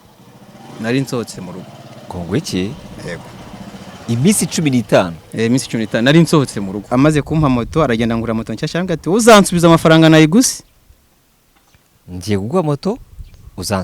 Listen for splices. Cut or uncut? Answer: cut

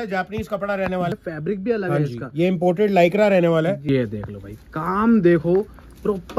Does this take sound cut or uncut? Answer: cut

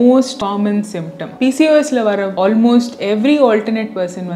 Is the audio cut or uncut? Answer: uncut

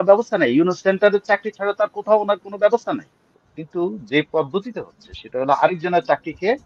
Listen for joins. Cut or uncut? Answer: cut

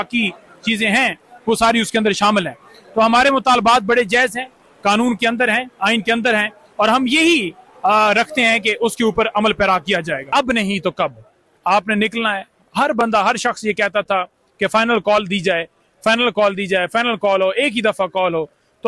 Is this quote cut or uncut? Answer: cut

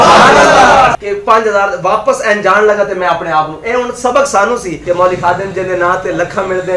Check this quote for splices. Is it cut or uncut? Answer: cut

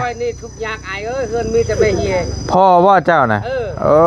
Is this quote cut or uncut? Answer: uncut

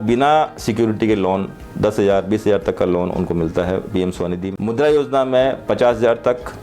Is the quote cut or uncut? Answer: cut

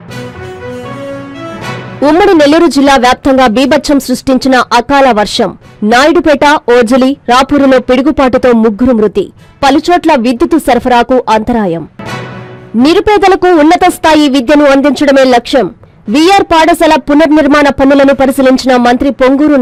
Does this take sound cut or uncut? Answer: uncut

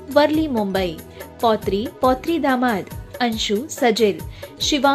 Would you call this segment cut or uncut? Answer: cut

